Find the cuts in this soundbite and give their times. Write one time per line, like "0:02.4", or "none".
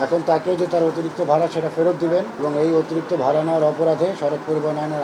0:02.3